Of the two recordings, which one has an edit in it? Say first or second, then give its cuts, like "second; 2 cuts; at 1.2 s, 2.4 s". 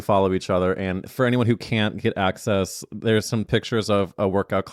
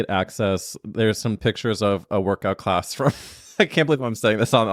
first; 1 cut; at 1.0 s